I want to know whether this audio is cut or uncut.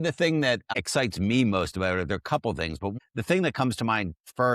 cut